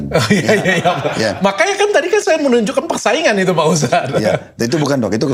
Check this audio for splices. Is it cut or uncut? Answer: uncut